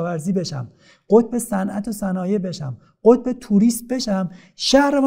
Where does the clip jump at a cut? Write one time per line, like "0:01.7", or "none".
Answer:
none